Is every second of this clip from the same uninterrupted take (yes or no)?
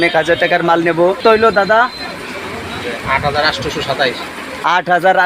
no